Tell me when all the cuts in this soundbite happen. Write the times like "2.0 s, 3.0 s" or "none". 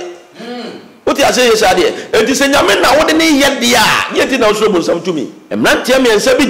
5.4 s